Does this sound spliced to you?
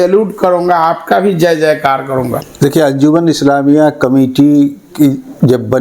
no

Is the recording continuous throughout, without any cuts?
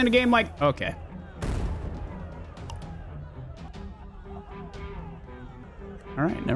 no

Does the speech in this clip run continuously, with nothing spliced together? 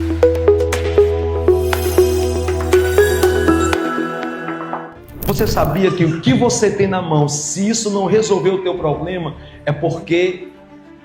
no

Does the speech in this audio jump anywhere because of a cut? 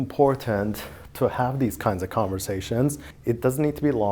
yes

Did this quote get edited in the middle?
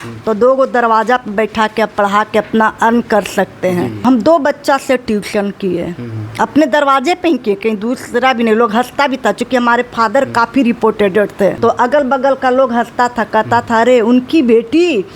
yes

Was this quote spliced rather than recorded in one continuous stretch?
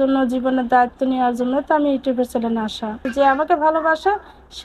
yes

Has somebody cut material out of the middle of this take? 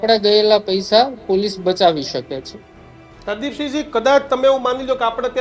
no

